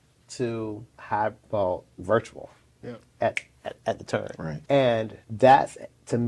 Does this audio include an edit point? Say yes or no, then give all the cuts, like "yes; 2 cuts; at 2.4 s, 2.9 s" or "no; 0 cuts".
yes; 3 cuts; at 0.9 s, 4.5 s, 5.2 s